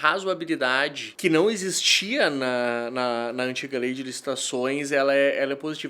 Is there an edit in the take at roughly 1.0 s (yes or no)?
yes